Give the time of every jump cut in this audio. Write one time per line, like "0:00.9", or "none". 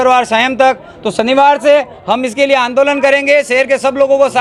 none